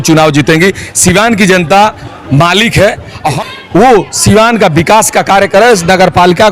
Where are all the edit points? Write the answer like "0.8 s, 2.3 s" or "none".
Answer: 3.4 s